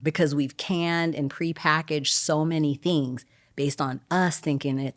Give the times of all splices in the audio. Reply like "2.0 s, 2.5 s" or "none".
none